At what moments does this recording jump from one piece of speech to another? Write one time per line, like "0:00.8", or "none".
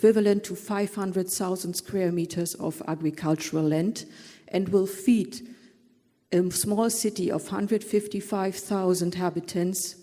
none